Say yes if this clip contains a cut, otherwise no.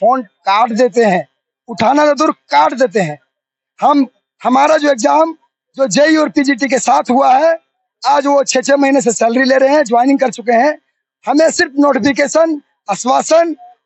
no